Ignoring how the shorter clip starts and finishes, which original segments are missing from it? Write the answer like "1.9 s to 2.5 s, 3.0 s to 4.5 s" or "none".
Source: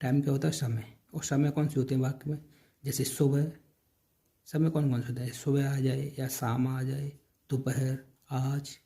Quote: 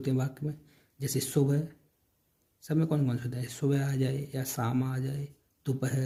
none